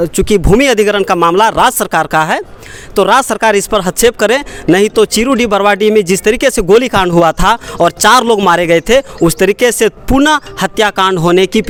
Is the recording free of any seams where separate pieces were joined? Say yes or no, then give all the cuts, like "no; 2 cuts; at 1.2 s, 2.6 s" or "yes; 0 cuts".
yes; 0 cuts